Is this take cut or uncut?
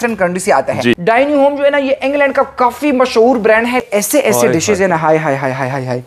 cut